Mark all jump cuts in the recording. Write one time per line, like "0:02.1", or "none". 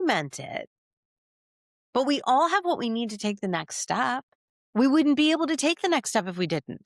none